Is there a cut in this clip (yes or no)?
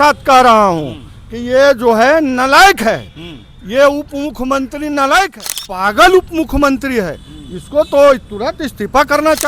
yes